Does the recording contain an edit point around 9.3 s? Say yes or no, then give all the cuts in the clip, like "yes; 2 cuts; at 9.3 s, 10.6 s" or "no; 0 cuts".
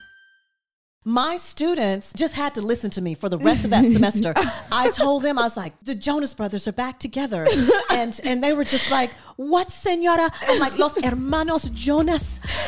no; 3 cuts; at 0.9 s, 2.1 s, 5.7 s